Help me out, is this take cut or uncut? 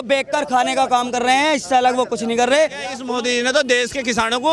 cut